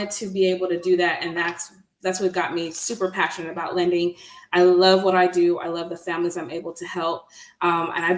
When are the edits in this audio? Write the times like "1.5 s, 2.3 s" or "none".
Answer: none